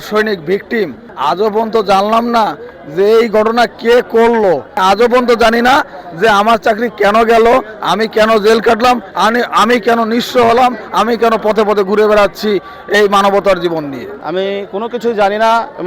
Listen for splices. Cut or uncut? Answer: cut